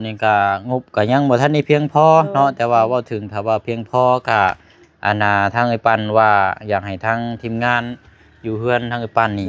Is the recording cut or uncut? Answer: uncut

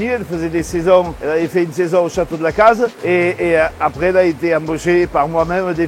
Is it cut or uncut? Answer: uncut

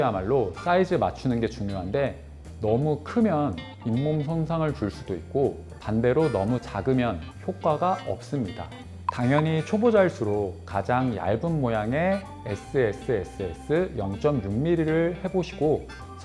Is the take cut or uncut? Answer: cut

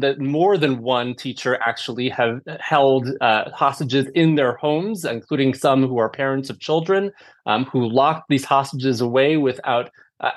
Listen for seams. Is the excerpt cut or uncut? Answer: uncut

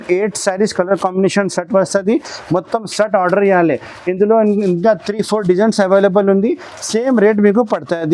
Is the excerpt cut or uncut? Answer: uncut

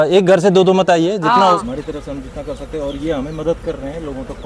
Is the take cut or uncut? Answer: cut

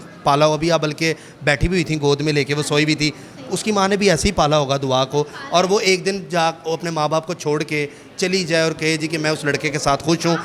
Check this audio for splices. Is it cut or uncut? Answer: uncut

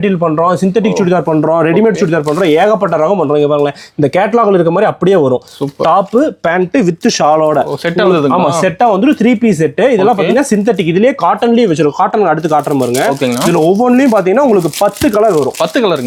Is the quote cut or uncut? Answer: uncut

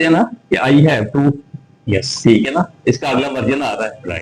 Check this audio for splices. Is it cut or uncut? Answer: uncut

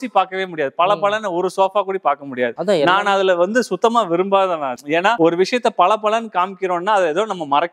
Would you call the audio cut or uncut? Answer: uncut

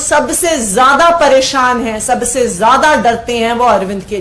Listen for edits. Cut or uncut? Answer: uncut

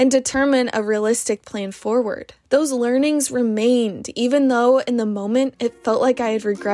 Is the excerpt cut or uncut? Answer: uncut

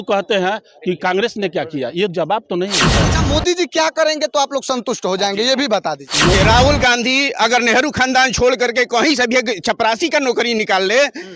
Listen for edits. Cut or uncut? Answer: cut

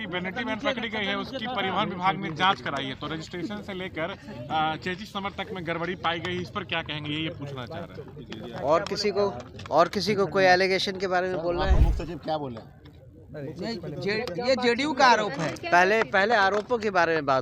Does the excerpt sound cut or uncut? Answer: uncut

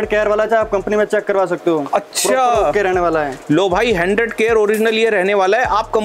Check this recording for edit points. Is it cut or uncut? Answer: uncut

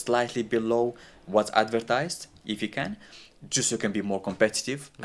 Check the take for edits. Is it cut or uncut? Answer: uncut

